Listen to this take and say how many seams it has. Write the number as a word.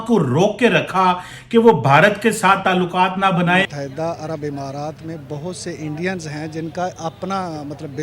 one